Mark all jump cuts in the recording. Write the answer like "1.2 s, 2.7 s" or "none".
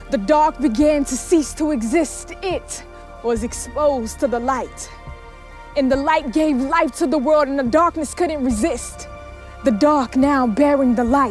2.6 s